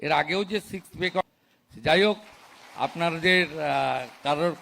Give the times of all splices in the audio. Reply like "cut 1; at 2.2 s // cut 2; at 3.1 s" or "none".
cut 1; at 1.2 s